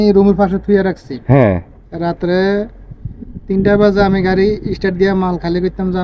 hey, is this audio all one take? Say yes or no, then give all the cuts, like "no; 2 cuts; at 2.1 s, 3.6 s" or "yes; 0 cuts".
yes; 0 cuts